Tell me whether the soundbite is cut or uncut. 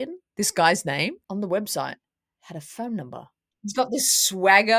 cut